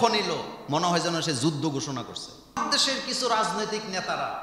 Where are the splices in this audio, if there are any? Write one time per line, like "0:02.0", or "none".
0:02.6